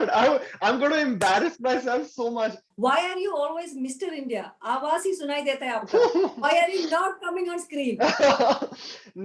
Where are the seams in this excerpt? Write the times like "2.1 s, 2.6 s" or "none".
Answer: 2.7 s

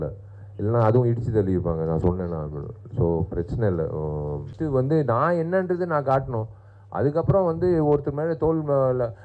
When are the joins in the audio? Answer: 4.5 s

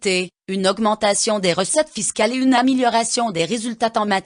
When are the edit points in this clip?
none

